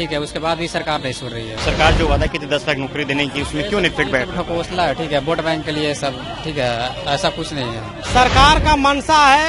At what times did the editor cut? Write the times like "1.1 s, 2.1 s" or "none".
1.6 s, 7.9 s

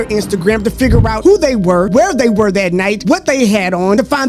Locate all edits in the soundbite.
none

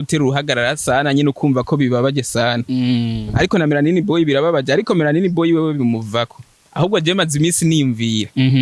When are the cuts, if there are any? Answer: none

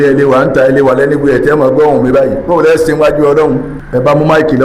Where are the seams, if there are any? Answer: 3.8 s

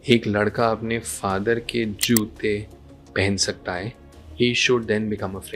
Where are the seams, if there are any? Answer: none

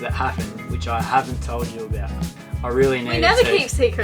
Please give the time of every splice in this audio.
2.3 s

